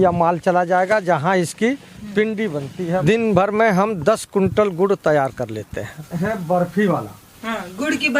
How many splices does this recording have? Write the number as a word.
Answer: two